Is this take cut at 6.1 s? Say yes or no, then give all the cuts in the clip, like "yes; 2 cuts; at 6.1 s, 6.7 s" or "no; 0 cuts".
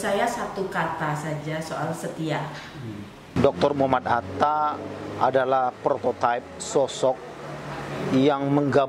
no; 1 cut; at 3.3 s